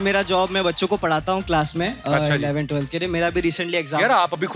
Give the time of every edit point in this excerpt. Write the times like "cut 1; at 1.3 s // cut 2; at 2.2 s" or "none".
none